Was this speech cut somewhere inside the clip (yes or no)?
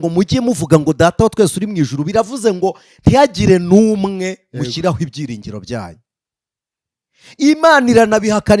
no